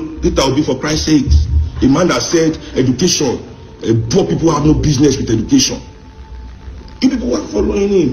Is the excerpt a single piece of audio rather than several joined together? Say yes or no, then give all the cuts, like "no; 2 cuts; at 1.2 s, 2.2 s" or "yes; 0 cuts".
yes; 0 cuts